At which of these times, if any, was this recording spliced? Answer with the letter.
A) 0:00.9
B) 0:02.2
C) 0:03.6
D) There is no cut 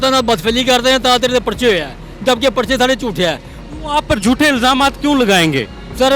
C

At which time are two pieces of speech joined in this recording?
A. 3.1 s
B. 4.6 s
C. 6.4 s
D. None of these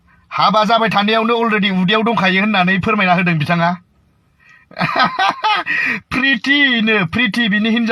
D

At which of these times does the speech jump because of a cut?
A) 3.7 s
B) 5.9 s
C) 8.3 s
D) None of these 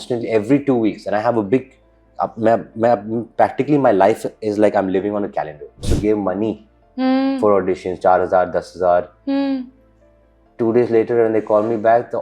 B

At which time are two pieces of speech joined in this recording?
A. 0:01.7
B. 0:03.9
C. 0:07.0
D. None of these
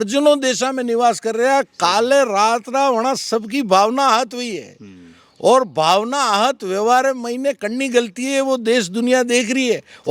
D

